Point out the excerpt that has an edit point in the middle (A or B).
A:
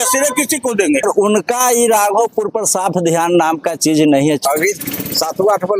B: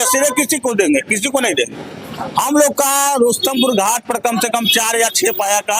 A